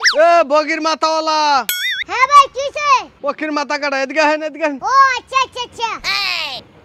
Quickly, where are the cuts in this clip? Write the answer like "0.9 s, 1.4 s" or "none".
2.0 s